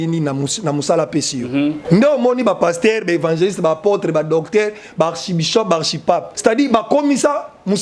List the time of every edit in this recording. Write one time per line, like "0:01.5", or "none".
0:01.8
0:06.3